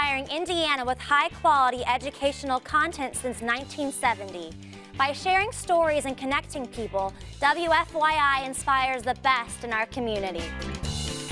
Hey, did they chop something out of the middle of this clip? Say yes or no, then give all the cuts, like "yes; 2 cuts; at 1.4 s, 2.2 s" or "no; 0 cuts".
no; 0 cuts